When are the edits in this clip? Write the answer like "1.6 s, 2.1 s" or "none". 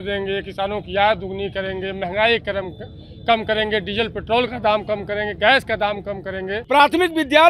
6.5 s